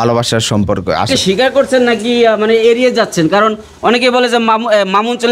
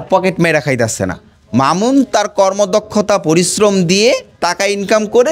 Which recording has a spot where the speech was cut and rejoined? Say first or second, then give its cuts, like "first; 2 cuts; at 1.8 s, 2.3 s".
first; 1 cut; at 1.1 s